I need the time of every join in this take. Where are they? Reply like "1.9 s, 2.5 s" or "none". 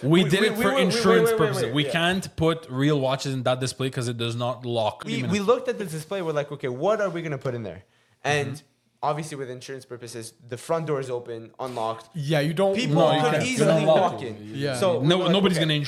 none

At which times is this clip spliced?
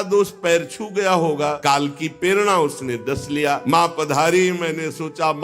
1.6 s, 3.6 s

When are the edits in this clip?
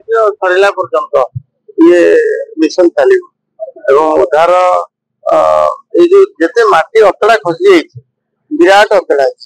none

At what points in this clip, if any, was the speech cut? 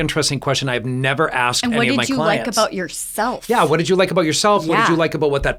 none

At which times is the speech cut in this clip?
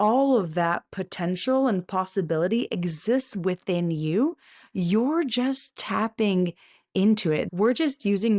7.5 s

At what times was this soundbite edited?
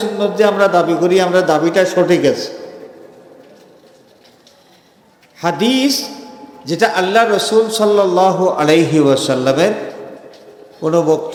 none

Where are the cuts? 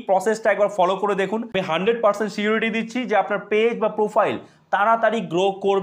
1.5 s

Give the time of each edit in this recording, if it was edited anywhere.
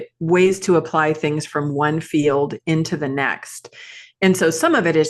none

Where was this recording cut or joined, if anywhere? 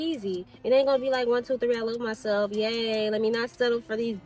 none

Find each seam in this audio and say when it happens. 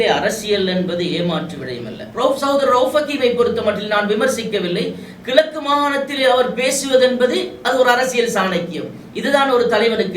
2.0 s

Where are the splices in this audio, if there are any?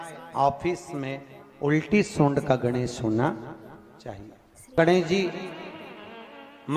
4.8 s

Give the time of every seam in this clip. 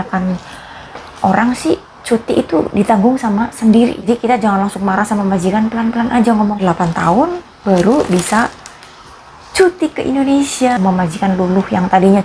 4.0 s, 6.6 s, 10.7 s

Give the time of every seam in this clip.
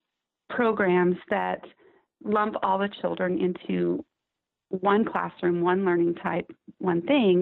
none

